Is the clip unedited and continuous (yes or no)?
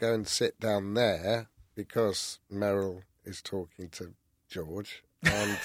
yes